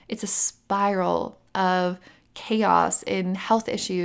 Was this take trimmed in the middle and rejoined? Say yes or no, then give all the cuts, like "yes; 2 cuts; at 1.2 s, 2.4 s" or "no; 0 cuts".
no; 0 cuts